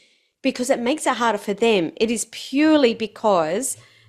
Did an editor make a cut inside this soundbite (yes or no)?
no